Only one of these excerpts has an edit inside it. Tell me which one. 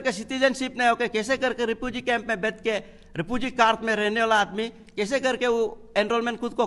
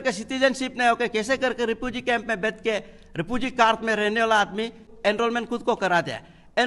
second; 1 cut; at 4.9 s

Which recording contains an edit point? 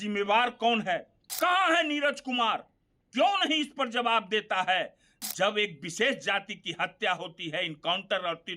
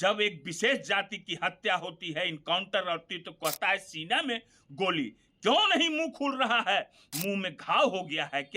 first; 1 cut; at 1.2 s

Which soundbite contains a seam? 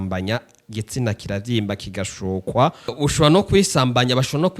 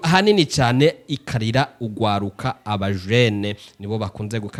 first; 1 cut; at 2.9 s

